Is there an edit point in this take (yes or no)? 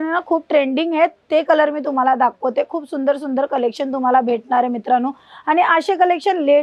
no